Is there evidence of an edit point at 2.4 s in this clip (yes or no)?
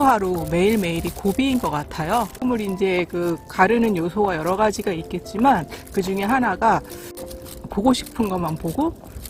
yes